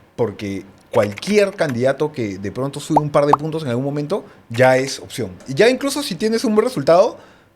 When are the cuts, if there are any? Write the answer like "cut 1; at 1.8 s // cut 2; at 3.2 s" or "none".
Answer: cut 1; at 5.4 s